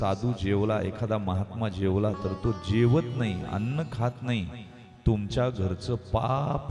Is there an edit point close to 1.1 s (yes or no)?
no